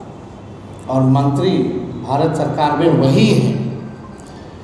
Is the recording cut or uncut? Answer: uncut